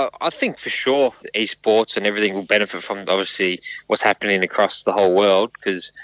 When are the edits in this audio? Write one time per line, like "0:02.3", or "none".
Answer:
0:01.2